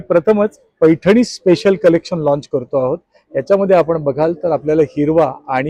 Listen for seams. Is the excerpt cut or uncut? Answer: uncut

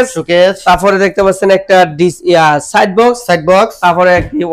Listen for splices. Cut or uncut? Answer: uncut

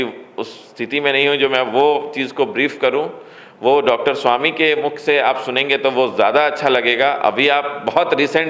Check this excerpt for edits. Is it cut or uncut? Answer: uncut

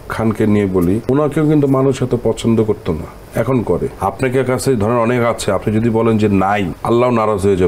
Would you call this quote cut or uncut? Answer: cut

